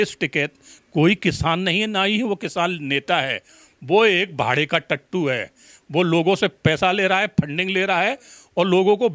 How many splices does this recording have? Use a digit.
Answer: 0